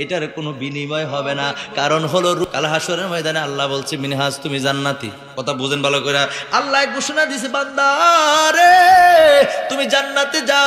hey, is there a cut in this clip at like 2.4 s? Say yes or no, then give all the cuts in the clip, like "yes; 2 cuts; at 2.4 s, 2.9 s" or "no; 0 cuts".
yes; 1 cut; at 2.4 s